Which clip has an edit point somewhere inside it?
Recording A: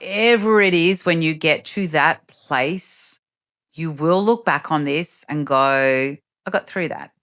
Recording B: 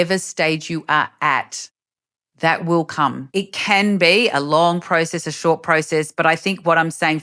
B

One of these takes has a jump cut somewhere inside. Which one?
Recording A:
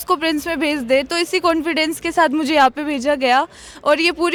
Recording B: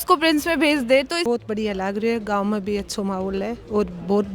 B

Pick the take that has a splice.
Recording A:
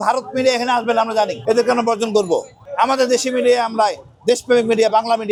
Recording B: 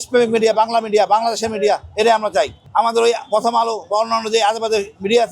B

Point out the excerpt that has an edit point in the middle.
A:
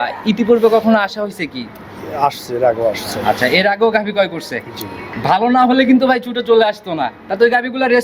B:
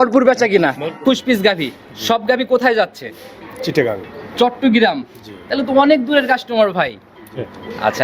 B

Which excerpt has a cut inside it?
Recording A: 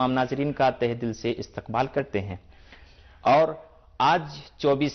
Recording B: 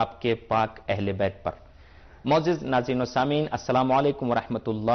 A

